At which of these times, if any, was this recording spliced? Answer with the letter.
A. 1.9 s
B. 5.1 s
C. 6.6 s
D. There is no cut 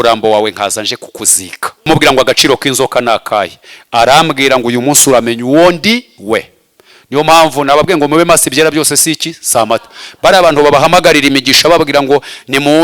A